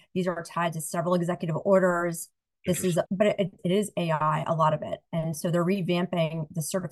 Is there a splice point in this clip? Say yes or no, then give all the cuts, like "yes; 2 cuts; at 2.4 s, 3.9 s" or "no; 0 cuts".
no; 0 cuts